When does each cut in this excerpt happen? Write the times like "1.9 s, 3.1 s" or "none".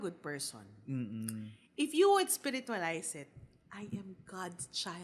none